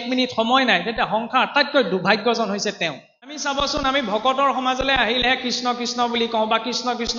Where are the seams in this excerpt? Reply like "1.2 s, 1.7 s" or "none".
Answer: 3.4 s